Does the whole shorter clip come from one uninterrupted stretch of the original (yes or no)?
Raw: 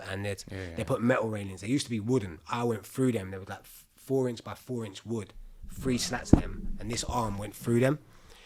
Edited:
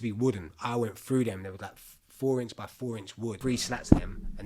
no